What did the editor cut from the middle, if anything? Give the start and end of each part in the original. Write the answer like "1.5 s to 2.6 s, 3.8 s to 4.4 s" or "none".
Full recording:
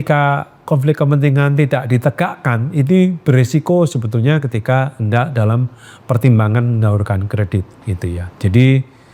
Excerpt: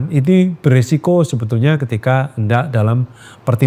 none